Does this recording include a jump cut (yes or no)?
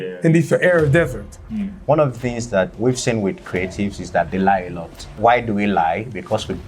yes